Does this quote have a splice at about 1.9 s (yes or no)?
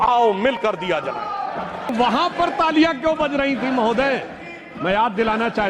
yes